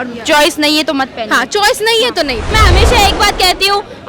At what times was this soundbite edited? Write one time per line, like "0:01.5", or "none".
0:02.5